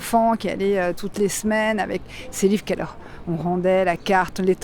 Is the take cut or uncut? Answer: cut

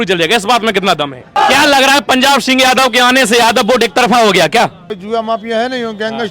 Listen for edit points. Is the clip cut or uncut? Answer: cut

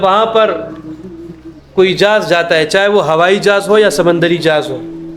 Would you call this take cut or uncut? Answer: uncut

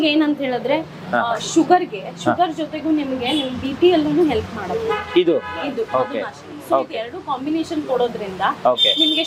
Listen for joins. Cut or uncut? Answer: uncut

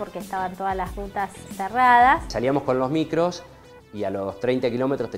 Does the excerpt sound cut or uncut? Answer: cut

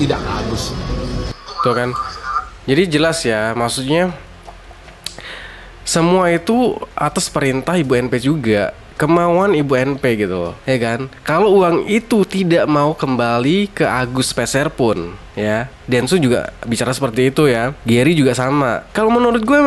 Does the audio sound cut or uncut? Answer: uncut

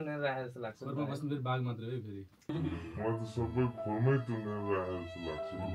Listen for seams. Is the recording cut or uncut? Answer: uncut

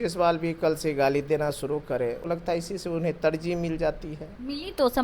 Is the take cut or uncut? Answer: cut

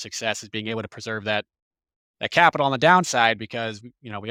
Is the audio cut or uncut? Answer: uncut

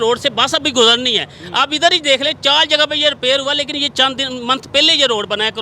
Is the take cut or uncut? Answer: uncut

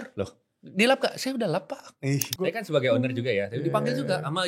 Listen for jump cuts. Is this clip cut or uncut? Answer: cut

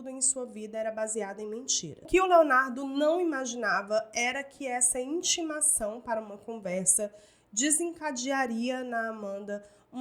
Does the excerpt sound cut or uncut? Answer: cut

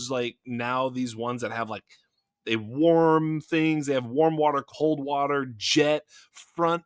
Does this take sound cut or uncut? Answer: uncut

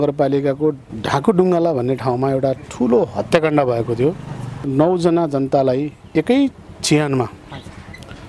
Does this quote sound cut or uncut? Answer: cut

